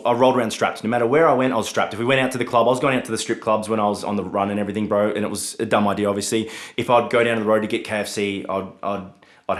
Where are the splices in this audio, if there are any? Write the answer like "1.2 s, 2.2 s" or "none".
none